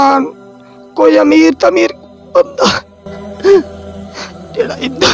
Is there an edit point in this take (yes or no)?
no